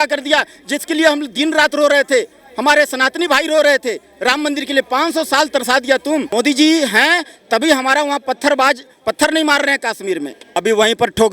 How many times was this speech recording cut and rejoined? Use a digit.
2